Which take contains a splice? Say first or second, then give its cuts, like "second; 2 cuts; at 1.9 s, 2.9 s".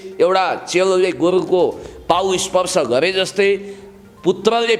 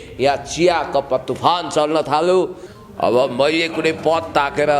second; 1 cut; at 2.7 s